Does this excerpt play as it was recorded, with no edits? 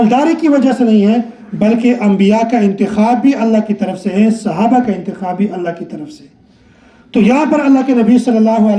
yes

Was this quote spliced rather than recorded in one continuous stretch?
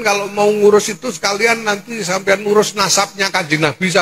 no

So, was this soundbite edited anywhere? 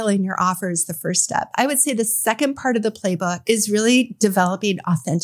no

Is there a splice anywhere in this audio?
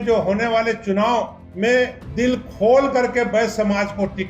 yes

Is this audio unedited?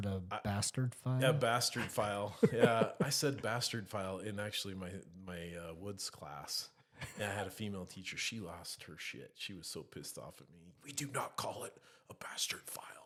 yes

